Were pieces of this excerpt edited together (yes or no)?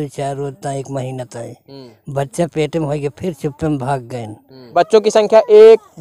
yes